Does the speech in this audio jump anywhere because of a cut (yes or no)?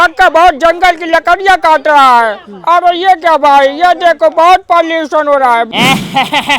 yes